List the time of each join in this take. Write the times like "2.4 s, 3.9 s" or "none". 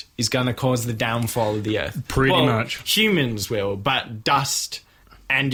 none